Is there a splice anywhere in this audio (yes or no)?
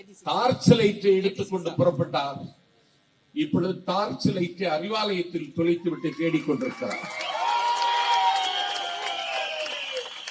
no